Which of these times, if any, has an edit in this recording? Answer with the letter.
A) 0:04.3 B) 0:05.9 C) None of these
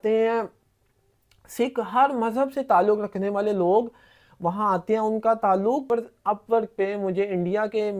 B